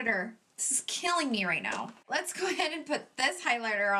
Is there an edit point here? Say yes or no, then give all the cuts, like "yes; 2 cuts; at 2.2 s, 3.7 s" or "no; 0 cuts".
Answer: no; 0 cuts